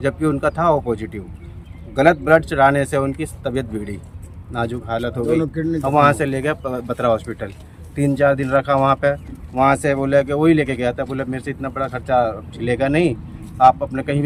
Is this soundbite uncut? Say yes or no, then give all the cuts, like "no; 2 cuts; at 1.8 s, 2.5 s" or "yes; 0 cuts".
yes; 0 cuts